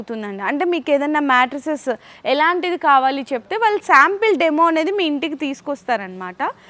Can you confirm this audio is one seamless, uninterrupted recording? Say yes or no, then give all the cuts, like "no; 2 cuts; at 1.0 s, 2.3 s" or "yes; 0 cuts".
yes; 0 cuts